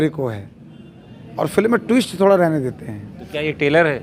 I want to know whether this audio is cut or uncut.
uncut